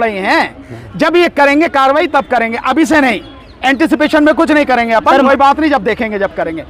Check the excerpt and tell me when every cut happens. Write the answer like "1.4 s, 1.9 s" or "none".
none